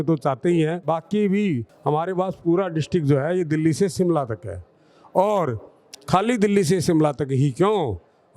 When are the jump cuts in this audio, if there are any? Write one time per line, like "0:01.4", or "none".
0:00.8
0:01.7